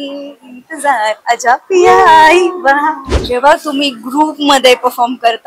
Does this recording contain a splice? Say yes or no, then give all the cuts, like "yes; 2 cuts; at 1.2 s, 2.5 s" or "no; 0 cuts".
yes; 1 cut; at 3.2 s